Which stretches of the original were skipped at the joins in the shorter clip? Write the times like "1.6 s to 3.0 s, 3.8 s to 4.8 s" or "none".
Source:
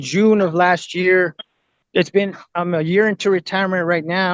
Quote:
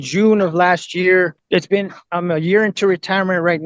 1.4 s to 1.8 s